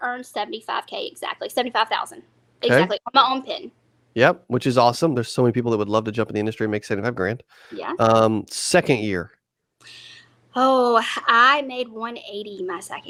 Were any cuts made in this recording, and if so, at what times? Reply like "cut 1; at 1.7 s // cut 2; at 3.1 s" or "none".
none